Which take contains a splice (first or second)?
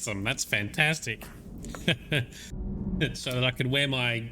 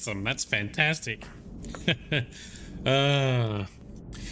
first